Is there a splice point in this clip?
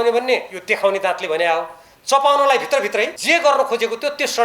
yes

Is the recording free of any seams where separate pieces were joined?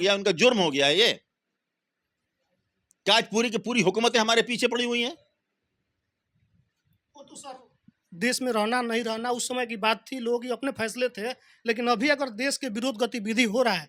yes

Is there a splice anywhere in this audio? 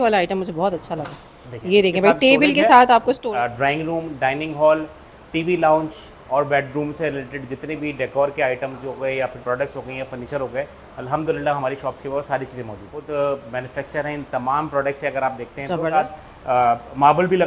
yes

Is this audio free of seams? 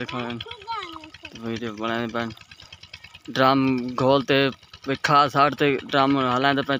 yes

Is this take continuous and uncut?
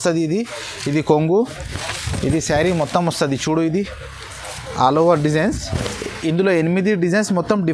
yes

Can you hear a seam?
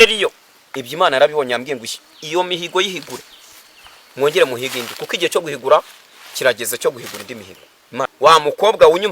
yes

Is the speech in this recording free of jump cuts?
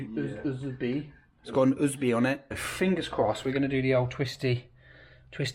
no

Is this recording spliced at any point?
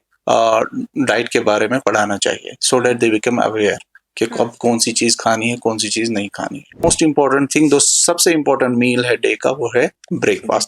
yes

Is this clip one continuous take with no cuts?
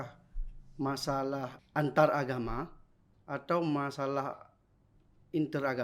no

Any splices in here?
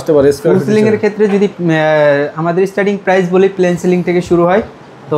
no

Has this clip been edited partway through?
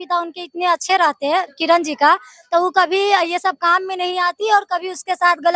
no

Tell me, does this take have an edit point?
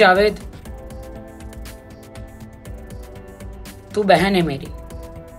yes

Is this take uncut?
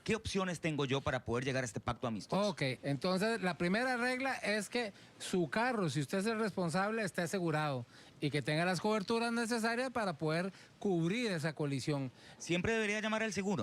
no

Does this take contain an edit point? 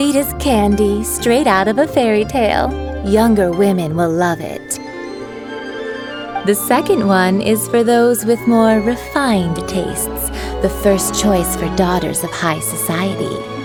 no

